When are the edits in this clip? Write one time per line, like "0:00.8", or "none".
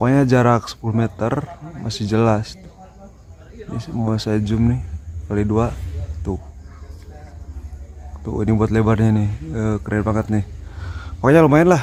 none

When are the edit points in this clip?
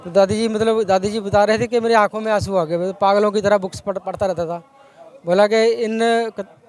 none

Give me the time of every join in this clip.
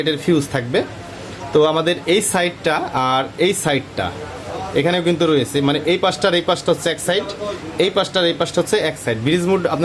none

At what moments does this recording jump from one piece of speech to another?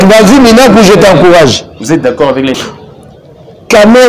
0:02.6

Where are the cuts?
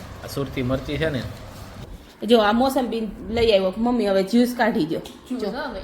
0:01.8

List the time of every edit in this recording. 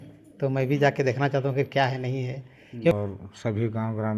0:02.9

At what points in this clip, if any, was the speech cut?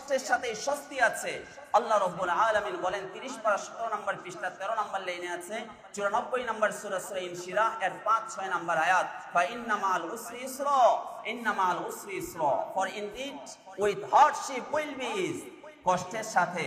none

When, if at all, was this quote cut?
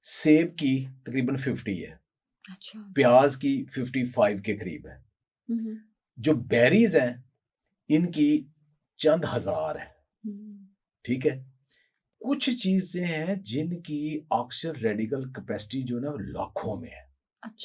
none

